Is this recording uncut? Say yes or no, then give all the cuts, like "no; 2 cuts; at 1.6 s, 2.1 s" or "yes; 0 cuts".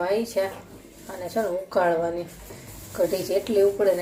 yes; 0 cuts